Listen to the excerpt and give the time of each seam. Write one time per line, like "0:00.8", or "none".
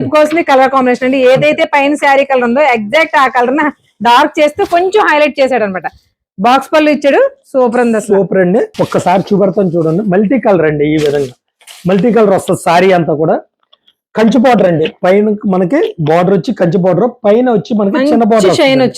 0:08.8